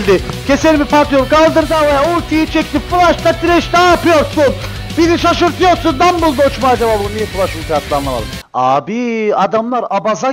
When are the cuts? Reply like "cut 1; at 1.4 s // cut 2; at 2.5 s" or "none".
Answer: cut 1; at 8.4 s